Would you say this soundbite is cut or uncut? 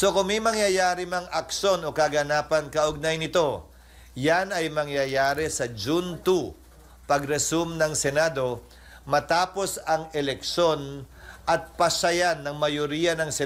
uncut